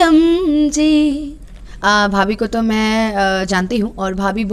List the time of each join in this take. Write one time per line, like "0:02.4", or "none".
0:01.3